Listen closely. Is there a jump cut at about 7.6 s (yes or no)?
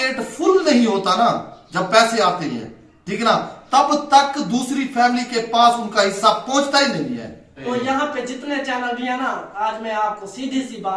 yes